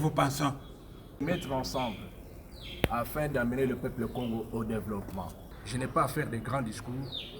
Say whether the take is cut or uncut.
cut